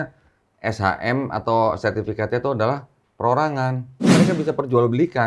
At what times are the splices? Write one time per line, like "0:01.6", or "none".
0:04.1

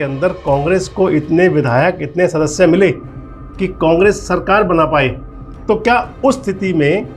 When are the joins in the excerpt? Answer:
none

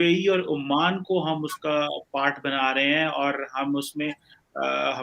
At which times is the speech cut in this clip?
none

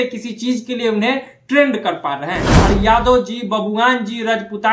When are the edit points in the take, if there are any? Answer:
0:02.5

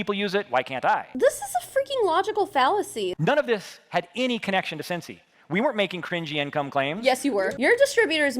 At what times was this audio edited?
0:03.1
0:07.5

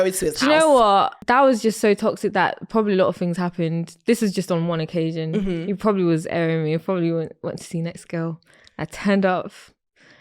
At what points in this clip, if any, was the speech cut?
0:01.2

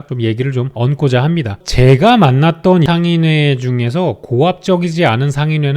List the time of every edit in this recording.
0:01.6
0:02.8

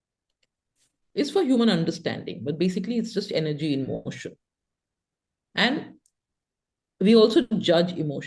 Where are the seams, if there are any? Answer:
none

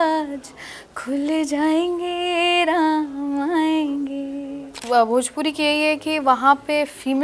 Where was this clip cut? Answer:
0:04.7

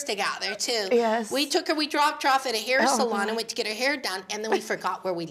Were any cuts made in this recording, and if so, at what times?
none

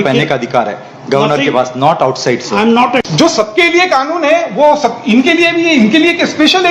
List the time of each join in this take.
0:02.8

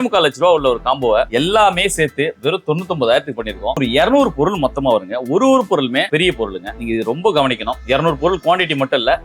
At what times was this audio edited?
0:01.3
0:03.8
0:06.4

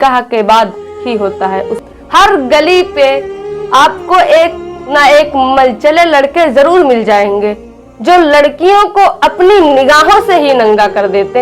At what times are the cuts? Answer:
0:01.7

